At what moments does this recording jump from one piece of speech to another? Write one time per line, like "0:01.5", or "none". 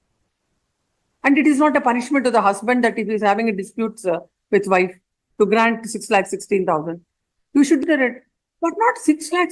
0:07.8